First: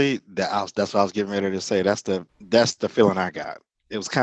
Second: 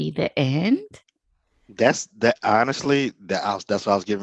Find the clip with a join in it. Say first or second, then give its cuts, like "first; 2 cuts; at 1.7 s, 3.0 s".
first; 1 cut; at 2.3 s